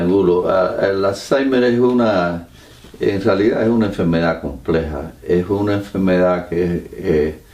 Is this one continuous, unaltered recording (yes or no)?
no